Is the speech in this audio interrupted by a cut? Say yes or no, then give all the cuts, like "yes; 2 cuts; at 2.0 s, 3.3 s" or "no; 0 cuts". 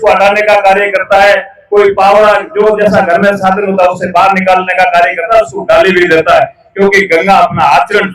yes; 1 cut; at 3.4 s